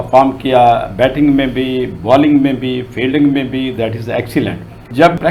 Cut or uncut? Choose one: uncut